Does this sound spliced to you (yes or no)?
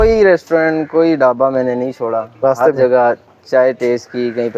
no